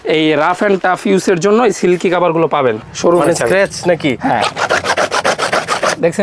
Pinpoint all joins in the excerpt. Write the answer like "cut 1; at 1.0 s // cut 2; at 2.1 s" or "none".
cut 1; at 2.8 s